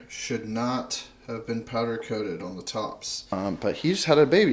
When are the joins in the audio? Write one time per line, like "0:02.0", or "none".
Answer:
0:03.4